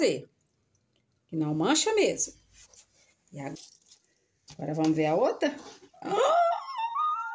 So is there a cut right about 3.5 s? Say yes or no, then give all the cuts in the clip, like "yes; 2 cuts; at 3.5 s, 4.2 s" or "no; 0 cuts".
yes; 1 cut; at 3.5 s